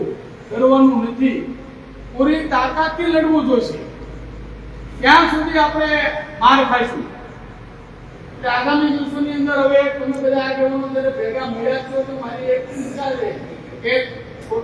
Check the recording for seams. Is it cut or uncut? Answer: uncut